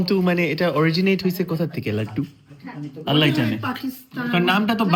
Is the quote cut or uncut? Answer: uncut